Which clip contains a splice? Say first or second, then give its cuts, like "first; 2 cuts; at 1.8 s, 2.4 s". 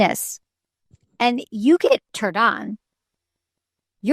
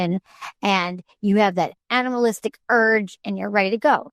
first; 1 cut; at 2.2 s